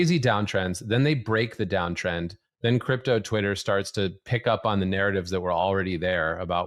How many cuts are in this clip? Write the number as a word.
zero